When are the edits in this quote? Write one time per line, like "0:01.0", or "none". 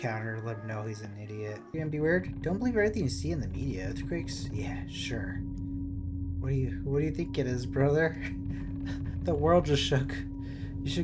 0:01.7